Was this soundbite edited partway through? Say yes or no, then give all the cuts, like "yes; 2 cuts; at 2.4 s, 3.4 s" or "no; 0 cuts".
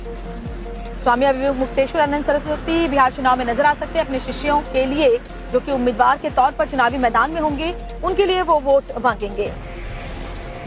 yes; 1 cut; at 3.8 s